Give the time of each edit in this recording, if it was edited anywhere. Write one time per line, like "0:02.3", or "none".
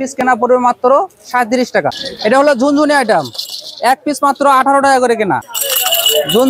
0:02.0
0:05.6

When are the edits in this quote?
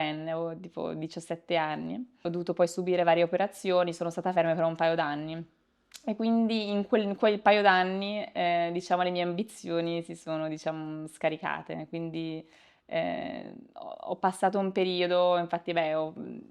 0:02.1

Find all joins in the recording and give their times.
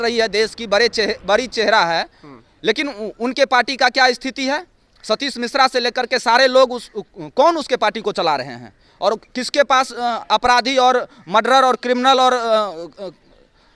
none

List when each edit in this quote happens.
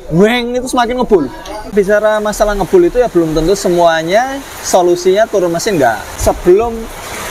0:01.7
0:06.1

